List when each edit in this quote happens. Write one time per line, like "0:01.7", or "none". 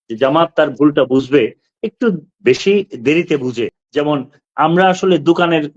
0:03.8